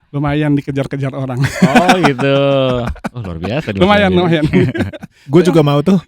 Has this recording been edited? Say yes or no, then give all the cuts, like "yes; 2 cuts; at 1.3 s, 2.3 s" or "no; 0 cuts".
no; 0 cuts